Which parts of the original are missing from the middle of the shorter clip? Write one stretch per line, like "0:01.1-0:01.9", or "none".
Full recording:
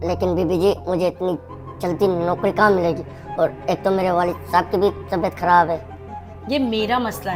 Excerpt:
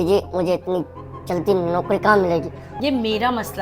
0:03.2-0:06.3